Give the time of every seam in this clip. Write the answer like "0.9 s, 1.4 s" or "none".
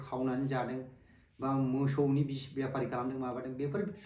none